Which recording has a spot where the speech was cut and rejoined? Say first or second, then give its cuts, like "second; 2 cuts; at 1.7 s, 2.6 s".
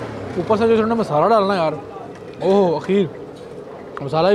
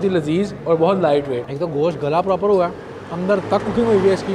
second; 1 cut; at 1.4 s